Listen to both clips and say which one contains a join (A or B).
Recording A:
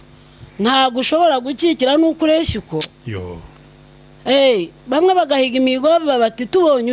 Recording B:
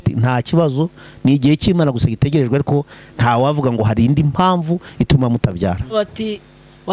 B